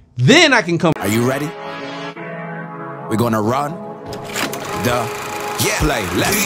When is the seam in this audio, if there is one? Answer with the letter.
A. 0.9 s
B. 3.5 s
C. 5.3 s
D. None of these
A